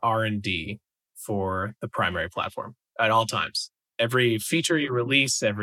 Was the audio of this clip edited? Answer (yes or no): no